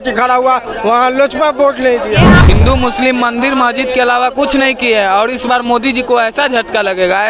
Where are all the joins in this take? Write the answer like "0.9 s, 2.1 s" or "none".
2.4 s